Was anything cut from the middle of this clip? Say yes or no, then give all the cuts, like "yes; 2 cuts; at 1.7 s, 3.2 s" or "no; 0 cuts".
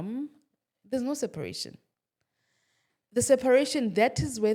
no; 0 cuts